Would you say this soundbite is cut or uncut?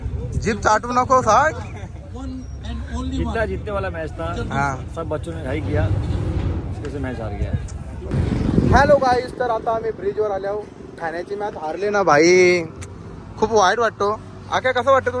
uncut